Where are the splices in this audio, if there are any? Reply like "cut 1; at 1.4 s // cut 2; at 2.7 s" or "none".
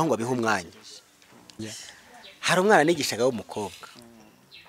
cut 1; at 1.6 s